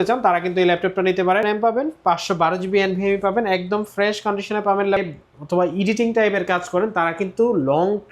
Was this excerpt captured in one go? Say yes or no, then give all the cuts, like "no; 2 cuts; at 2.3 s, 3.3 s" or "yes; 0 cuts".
no; 2 cuts; at 1.4 s, 5.0 s